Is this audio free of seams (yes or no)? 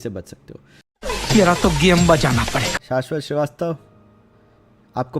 no